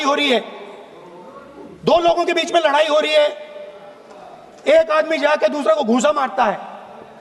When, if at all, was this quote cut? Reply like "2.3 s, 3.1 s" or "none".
none